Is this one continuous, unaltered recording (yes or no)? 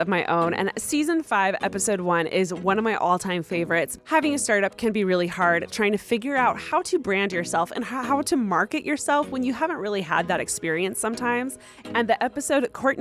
yes